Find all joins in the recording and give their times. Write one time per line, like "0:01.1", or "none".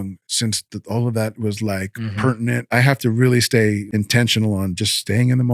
0:02.7
0:03.9